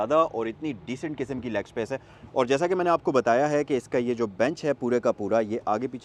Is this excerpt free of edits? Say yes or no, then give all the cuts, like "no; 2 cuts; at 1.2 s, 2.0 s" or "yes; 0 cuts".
yes; 0 cuts